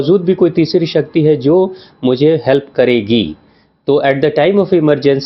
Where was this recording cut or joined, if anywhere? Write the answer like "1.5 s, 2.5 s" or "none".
none